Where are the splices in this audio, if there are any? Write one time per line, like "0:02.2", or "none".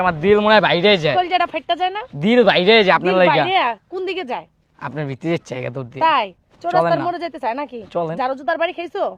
none